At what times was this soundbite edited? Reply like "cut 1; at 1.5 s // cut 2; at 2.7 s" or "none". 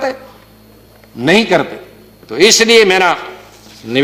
none